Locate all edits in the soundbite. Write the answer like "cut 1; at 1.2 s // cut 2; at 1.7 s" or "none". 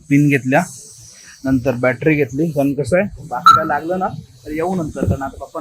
none